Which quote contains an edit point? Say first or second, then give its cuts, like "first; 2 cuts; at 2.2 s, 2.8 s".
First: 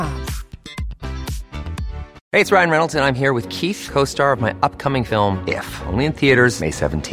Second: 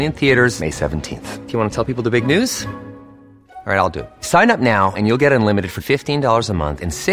first; 1 cut; at 2.2 s